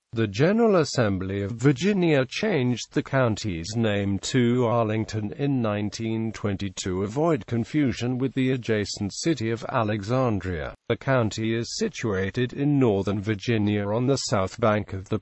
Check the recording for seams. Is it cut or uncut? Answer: uncut